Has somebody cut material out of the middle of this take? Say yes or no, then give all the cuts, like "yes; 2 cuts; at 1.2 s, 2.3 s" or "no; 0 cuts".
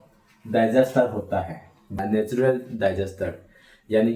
yes; 1 cut; at 2.0 s